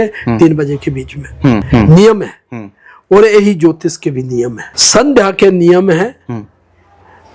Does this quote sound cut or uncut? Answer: cut